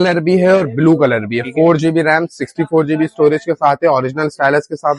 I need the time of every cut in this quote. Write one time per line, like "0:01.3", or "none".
none